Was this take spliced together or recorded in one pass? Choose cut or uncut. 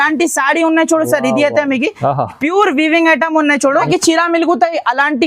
cut